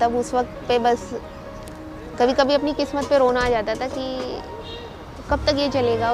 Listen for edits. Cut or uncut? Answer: uncut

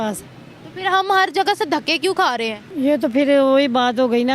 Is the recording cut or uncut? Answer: cut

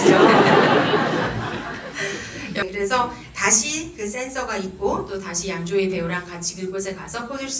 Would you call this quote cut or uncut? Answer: cut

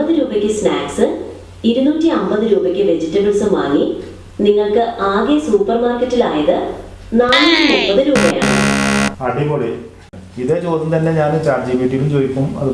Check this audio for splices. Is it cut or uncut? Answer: cut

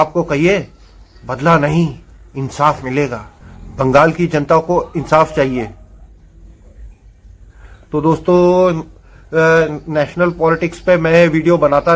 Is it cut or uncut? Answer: uncut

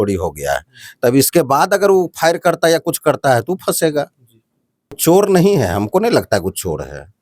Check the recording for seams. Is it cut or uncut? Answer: cut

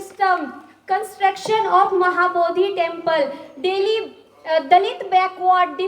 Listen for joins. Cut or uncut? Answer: uncut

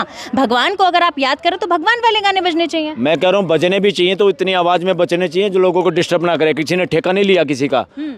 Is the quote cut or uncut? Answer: uncut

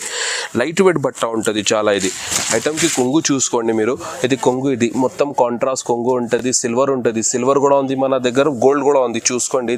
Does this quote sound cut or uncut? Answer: uncut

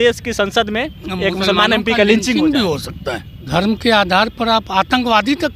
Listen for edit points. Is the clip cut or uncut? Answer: cut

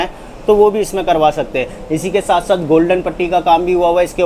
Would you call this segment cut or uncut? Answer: uncut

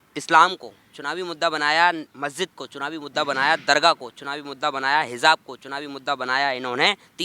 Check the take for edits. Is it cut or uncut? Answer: cut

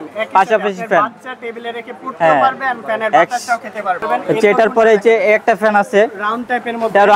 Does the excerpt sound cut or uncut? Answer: cut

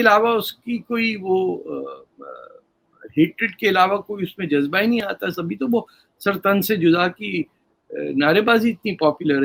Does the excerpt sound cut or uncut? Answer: uncut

